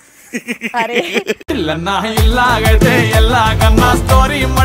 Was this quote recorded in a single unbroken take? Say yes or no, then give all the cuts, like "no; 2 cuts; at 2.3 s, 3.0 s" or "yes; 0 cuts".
yes; 0 cuts